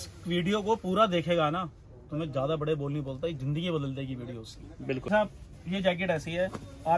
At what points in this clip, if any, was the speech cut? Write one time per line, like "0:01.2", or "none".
0:05.1